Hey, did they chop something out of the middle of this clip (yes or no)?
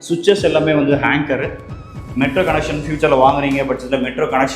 yes